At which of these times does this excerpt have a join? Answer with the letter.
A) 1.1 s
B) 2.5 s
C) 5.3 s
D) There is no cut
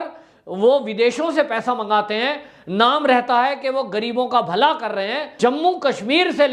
C